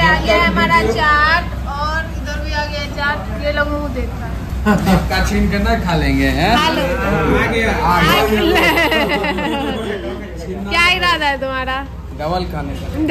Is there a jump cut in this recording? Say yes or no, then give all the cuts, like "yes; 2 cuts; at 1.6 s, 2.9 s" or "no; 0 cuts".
no; 0 cuts